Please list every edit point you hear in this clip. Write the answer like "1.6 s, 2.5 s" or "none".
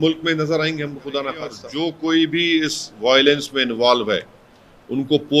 1.6 s